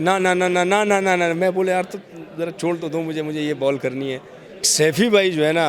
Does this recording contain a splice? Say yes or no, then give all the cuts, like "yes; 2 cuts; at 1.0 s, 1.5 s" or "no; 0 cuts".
yes; 1 cut; at 4.6 s